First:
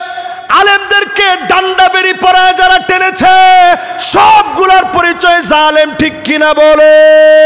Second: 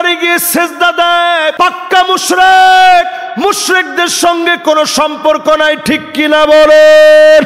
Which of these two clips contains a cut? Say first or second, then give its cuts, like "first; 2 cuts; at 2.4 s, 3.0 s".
second; 1 cut; at 1.5 s